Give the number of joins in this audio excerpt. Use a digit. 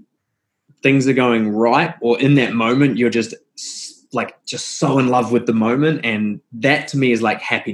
0